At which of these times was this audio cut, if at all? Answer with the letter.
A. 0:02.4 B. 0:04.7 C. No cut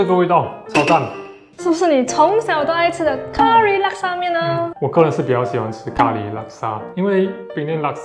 B